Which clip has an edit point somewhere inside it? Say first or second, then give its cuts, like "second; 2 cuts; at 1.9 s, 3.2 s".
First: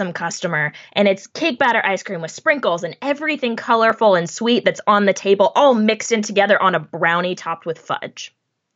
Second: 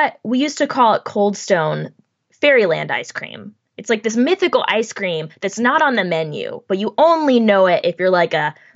second; 1 cut; at 2.2 s